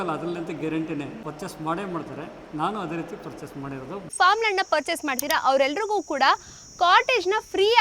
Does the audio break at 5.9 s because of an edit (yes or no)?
no